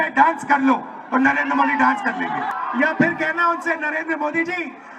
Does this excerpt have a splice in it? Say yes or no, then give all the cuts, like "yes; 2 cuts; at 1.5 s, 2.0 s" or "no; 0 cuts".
yes; 1 cut; at 2.5 s